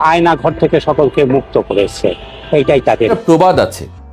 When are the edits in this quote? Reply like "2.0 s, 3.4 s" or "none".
3.2 s

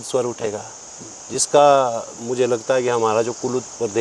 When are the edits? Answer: none

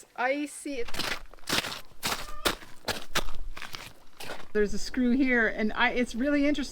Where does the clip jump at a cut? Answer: 0.8 s, 4.5 s

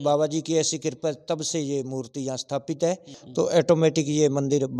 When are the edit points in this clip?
3.2 s

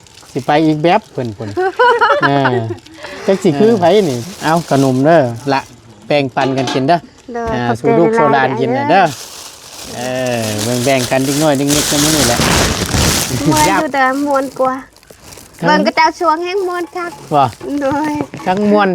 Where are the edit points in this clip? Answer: 4.2 s, 13.5 s

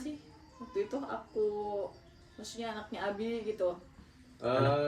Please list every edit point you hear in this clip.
none

